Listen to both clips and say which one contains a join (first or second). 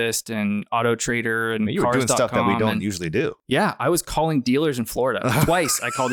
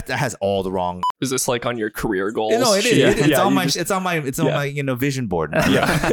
second